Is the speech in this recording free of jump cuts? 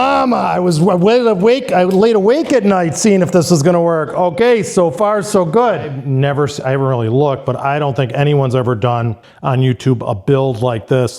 no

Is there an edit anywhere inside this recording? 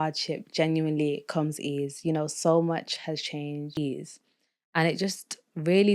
yes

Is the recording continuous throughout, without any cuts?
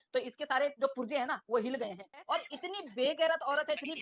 no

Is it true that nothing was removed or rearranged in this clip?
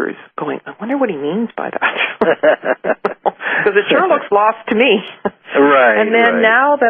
yes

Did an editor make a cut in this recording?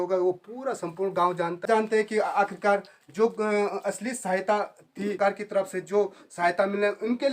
yes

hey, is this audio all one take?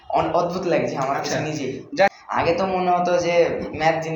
no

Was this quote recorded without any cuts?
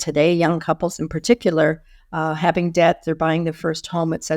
yes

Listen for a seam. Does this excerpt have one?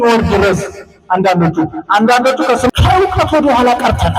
yes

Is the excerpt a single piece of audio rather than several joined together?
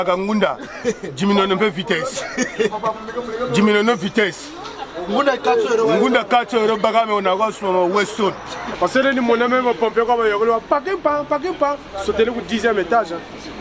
no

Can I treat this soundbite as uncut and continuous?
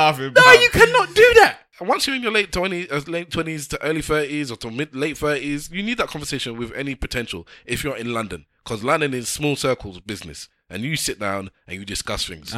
no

